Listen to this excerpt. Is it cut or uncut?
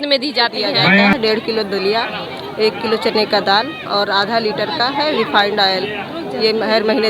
cut